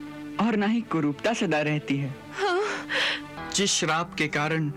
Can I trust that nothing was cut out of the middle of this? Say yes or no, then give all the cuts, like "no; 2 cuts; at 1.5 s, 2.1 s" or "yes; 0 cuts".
no; 1 cut; at 3.4 s